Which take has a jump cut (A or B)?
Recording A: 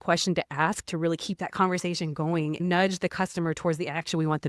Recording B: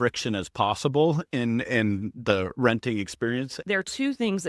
B